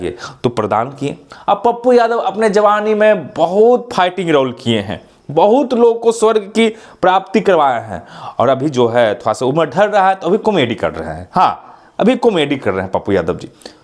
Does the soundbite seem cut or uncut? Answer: uncut